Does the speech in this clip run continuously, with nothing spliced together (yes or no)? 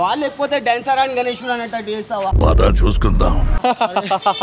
yes